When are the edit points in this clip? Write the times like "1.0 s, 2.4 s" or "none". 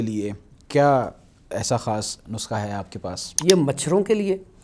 3.3 s